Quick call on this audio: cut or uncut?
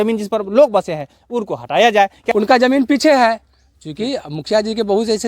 cut